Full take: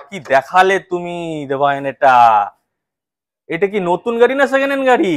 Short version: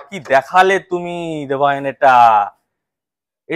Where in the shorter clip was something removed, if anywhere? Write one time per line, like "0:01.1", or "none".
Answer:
none